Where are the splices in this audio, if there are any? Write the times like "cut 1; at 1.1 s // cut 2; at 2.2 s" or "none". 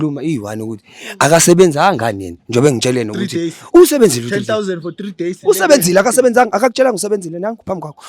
cut 1; at 5.4 s